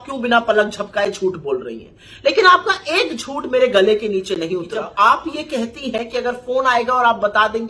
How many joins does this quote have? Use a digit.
1